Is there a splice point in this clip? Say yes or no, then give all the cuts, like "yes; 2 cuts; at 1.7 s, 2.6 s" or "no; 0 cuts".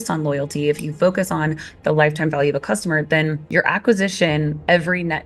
no; 0 cuts